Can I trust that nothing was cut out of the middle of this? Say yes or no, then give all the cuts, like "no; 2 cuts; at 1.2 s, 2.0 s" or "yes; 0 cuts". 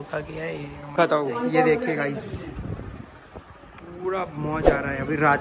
no; 1 cut; at 0.9 s